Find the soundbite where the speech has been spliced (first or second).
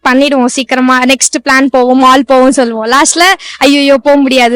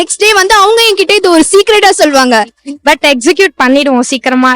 second